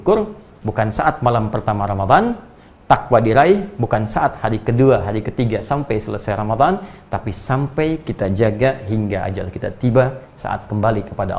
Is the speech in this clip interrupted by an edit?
no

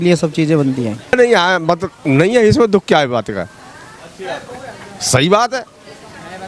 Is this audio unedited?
no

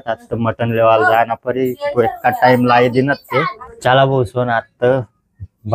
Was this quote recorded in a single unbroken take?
no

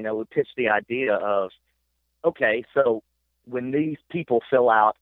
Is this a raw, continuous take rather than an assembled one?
yes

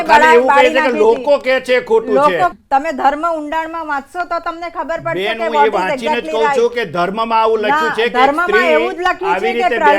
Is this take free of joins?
no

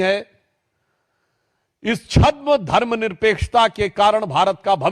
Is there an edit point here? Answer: no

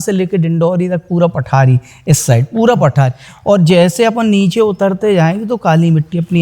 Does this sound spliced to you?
no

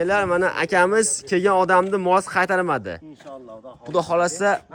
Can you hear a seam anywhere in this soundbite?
no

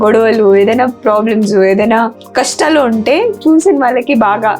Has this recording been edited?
yes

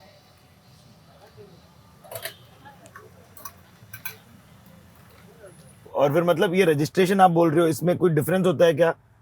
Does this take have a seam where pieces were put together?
yes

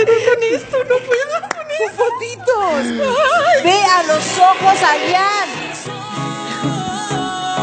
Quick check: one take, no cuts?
yes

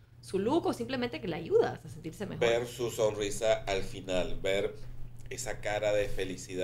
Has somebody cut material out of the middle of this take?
no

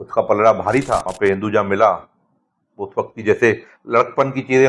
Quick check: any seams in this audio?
yes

